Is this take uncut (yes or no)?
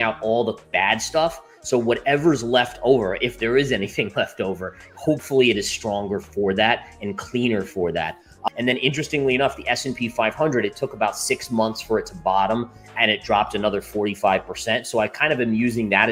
yes